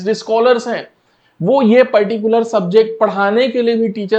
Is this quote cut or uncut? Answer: uncut